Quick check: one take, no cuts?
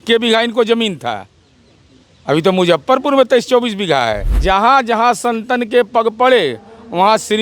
no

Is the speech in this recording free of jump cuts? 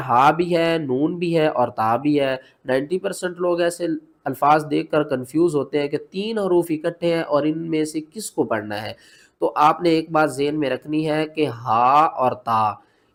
yes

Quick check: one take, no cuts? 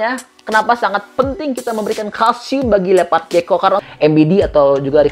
no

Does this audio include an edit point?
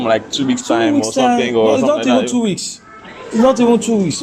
no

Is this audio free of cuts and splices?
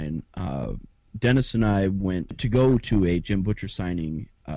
no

